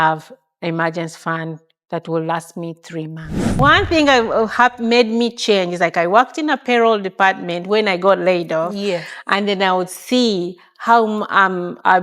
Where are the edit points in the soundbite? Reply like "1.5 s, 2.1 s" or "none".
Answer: 3.6 s